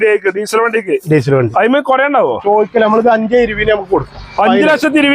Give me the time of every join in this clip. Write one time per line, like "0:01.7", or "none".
0:02.4

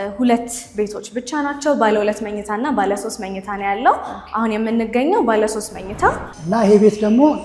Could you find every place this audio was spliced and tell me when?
0:06.3

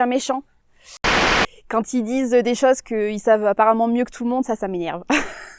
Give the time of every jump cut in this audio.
0:01.2

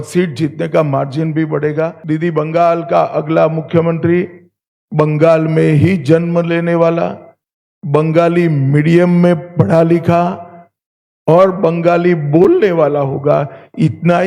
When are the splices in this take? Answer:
0:02.0

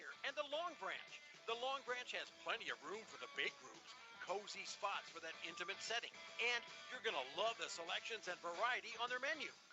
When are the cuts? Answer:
0:08.7

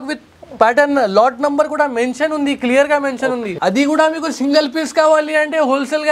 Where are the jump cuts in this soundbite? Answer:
0:03.5

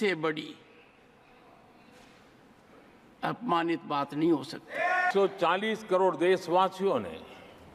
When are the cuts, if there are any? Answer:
0:05.1

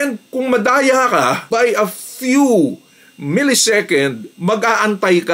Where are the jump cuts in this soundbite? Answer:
none

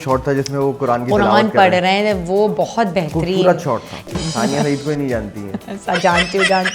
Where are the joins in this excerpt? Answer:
0:04.0

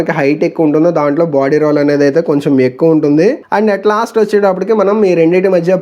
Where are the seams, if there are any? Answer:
none

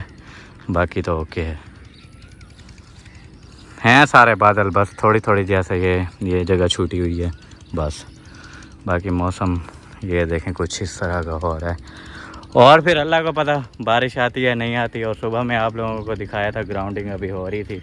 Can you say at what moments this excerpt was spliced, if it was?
none

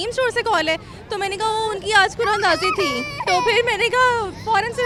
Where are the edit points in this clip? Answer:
none

